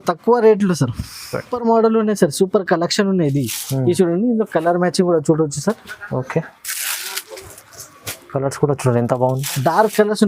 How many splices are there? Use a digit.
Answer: 1